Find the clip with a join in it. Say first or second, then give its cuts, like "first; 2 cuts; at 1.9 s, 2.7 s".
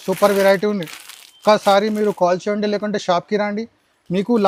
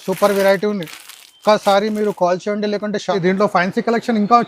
second; 1 cut; at 3.1 s